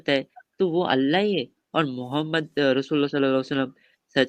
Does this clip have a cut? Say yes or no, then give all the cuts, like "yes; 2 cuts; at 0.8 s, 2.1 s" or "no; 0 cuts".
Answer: no; 0 cuts